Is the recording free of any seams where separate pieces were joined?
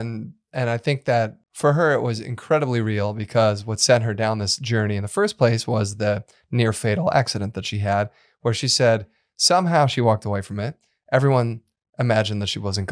no; 1 cut; at 1.4 s

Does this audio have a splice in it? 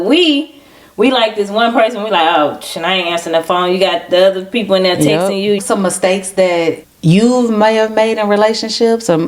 yes; 2 cuts; at 5.6 s, 6.9 s

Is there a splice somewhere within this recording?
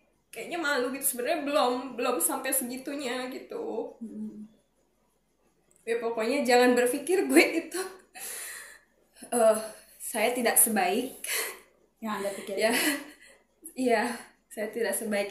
no; 0 cuts

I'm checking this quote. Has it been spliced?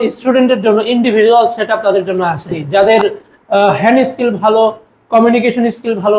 yes; 1 cut; at 2.6 s

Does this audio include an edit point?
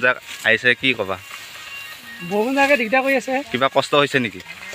no; 0 cuts

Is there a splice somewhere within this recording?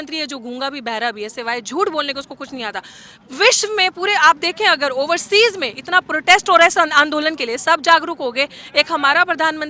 no; 0 cuts

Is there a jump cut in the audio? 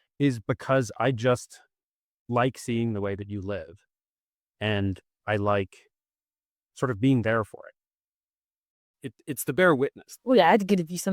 yes; 1 cut; at 10.1 s

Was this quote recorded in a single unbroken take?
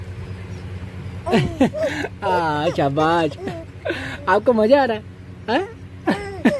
no; 1 cut; at 0.9 s

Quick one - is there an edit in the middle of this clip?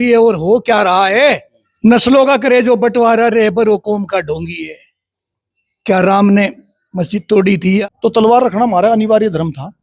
yes; 2 cuts; at 1.6 s, 7.8 s

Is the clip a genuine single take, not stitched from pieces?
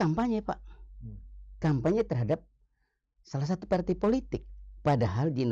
yes; 0 cuts

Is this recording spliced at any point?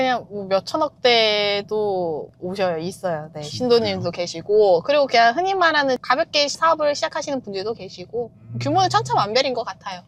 no; 0 cuts

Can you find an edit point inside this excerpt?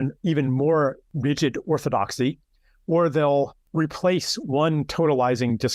yes; 2 cuts; at 1.1 s, 3.6 s

